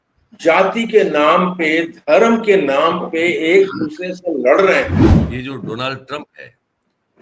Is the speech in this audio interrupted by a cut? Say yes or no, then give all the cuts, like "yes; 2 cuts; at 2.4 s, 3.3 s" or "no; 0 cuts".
yes; 1 cut; at 5.1 s